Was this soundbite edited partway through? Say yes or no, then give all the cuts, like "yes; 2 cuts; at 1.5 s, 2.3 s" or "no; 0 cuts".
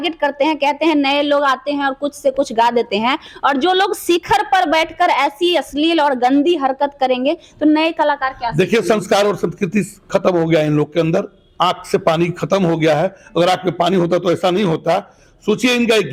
no; 0 cuts